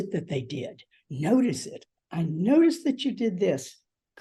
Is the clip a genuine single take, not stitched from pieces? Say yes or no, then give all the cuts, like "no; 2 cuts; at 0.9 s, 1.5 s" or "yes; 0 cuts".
yes; 0 cuts